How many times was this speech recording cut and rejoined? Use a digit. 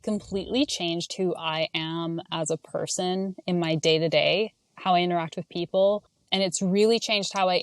1